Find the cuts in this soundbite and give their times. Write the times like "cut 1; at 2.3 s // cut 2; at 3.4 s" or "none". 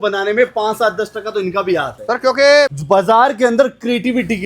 cut 1; at 2.8 s